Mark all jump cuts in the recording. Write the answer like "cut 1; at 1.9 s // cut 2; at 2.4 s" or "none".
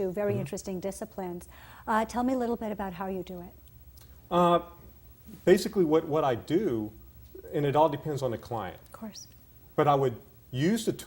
cut 1; at 2.5 s